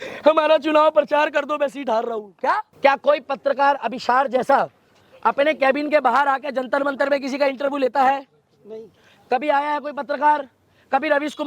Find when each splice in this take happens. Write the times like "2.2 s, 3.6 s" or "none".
2.7 s